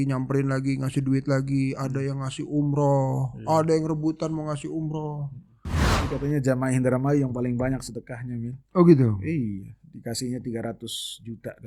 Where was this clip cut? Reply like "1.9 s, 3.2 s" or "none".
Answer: 5.9 s